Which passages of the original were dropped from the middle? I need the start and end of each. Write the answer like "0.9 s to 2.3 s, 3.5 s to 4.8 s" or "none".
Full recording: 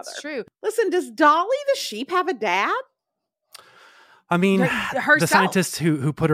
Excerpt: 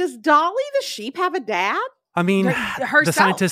2.9 s to 4.1 s